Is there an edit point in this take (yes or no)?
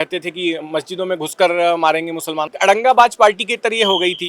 yes